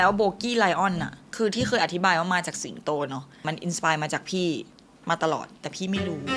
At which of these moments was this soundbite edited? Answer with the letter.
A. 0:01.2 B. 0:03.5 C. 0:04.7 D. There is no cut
B